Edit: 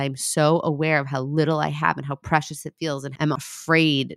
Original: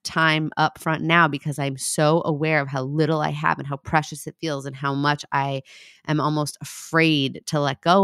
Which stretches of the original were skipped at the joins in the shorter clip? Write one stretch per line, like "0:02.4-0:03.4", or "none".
0:04.8-0:06.5